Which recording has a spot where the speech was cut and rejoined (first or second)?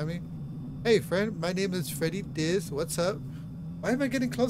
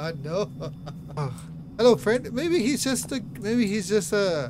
second